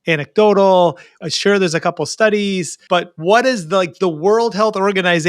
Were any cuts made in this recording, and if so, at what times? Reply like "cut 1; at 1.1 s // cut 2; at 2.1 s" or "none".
cut 1; at 1.1 s // cut 2; at 2.7 s